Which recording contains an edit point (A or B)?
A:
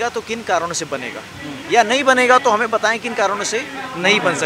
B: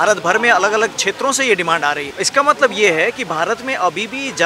B